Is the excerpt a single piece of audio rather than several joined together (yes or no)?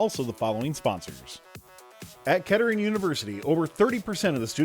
no